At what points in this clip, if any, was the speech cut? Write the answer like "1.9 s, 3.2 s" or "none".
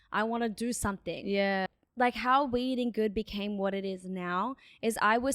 1.8 s